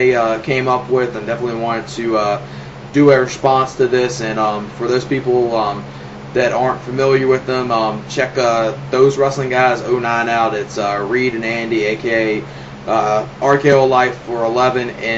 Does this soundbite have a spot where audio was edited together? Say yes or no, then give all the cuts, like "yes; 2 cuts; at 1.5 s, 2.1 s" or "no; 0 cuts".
yes; 1 cut; at 1.7 s